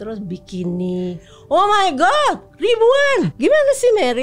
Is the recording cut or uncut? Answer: cut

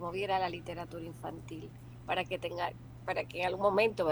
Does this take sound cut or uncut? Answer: uncut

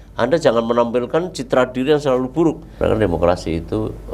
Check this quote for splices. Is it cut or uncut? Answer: cut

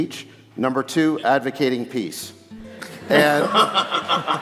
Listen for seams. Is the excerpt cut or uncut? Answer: uncut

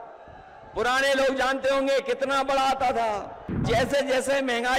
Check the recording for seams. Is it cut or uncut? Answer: cut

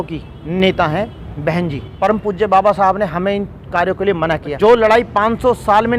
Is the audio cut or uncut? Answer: cut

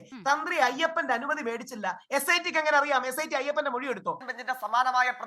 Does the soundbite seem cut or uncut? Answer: cut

